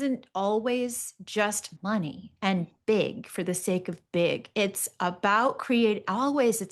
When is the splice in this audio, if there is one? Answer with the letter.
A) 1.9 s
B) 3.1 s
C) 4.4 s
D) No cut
A